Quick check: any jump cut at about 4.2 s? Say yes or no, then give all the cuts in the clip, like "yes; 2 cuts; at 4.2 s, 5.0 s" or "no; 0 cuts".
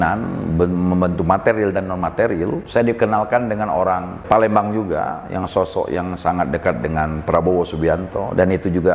yes; 2 cuts; at 2.6 s, 4.2 s